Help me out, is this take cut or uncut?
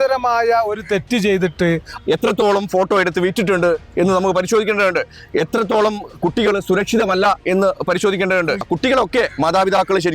cut